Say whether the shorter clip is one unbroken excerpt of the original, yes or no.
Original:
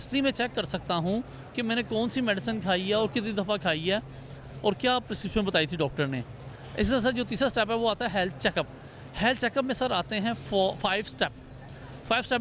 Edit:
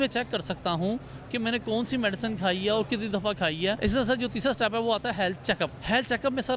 no